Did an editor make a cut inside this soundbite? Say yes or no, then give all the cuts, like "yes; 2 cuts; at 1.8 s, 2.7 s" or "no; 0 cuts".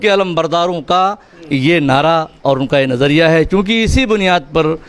no; 0 cuts